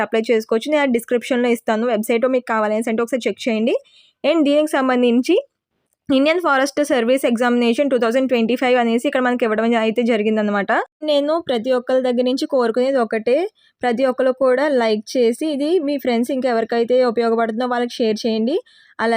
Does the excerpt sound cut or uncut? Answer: cut